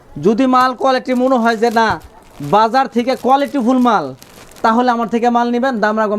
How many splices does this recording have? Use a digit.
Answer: 0